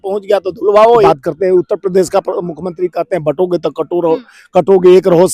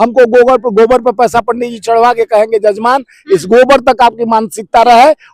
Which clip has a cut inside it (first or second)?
first